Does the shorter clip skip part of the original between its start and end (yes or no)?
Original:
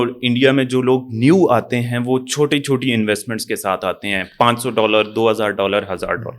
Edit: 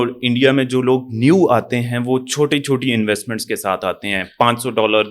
no